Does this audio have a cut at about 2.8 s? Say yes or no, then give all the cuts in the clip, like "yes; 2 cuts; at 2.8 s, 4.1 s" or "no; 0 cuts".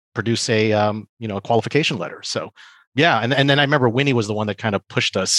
yes; 1 cut; at 2.8 s